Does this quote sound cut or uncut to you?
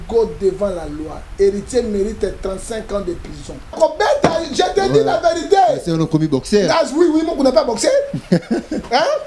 cut